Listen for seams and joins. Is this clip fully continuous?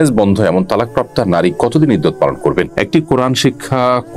no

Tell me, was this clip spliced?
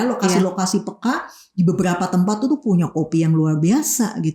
no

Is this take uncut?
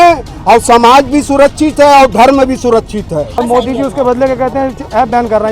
no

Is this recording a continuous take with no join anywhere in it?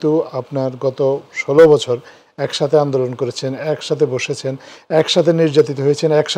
yes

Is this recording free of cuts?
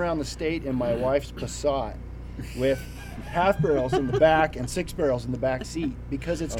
yes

